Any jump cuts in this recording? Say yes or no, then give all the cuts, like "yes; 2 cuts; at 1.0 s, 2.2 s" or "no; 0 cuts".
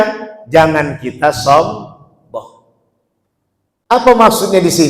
yes; 1 cut; at 3.9 s